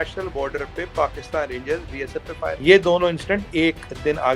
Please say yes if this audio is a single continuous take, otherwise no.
no